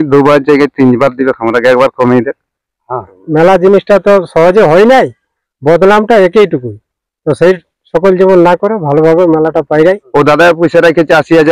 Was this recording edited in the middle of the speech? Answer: yes; 2 cuts; at 3.2 s, 10.0 s

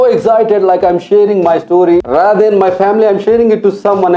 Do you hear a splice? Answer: yes; 1 cut; at 2.1 s

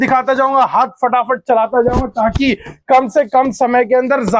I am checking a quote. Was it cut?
no; 0 cuts

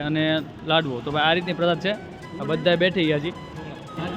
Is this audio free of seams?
yes; 0 cuts

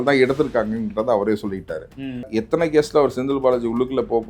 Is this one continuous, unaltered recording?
no; 1 cut; at 2.3 s

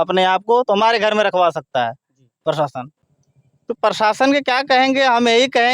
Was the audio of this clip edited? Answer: yes; 1 cut; at 2.9 s

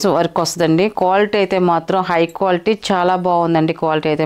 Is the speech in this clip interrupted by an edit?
no; 0 cuts

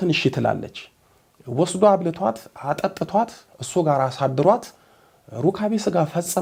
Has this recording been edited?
no; 0 cuts

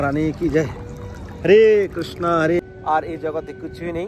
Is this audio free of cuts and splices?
no; 1 cut; at 2.6 s

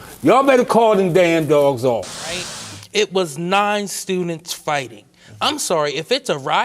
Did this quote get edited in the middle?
yes; 1 cut; at 2.5 s

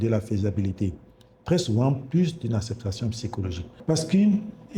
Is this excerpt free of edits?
no; 1 cut; at 3.7 s

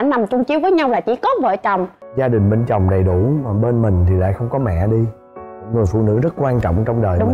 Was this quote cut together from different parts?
yes; 1 cut; at 2.0 s

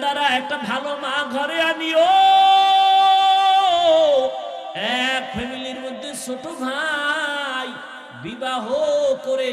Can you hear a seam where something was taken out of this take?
yes; 1 cut; at 4.8 s

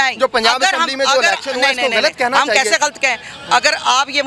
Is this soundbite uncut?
yes; 0 cuts

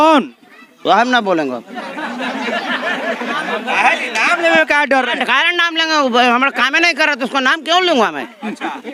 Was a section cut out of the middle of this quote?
no; 0 cuts

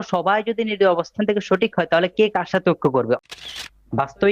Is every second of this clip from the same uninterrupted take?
no; 1 cut; at 3.3 s

